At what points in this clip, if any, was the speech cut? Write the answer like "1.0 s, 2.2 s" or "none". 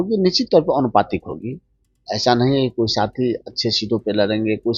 none